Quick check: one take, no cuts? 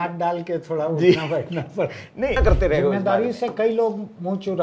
no; 1 cut; at 2.4 s

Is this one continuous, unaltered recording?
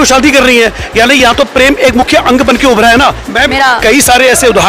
no; 1 cut; at 3.2 s

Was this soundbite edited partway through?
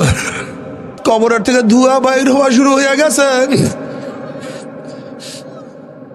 yes; 1 cut; at 1.0 s

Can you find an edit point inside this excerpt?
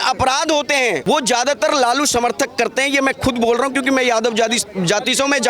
yes; 1 cut; at 1.0 s

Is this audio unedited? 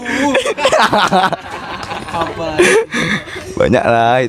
yes; 0 cuts

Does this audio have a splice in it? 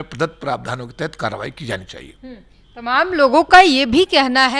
no; 0 cuts

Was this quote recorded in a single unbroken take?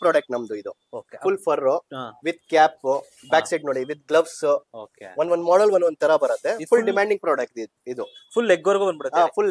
yes; 0 cuts

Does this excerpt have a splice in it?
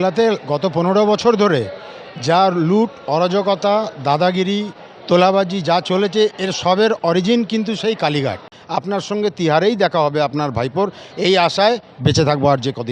yes; 1 cut; at 8.4 s

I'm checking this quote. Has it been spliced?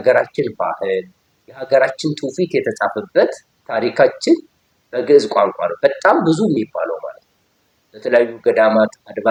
no; 0 cuts

